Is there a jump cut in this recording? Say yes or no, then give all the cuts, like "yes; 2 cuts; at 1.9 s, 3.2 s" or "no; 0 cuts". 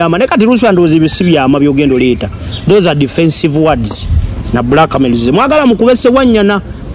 no; 0 cuts